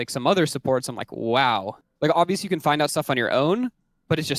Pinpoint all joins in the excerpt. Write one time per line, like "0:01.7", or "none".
0:01.8